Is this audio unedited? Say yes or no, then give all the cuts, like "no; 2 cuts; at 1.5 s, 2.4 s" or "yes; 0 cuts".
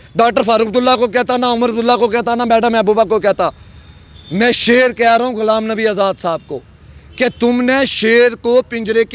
yes; 0 cuts